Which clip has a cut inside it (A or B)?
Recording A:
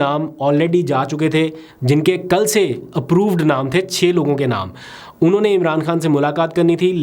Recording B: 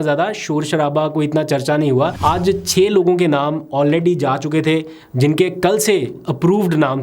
B